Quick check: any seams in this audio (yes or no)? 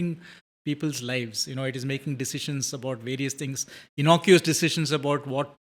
no